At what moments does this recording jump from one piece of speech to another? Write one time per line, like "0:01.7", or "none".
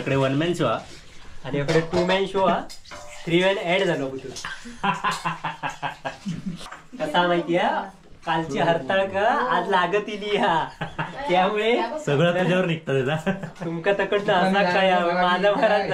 0:06.7